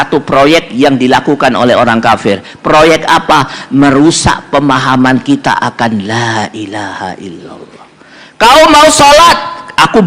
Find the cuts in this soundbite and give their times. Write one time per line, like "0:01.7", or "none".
none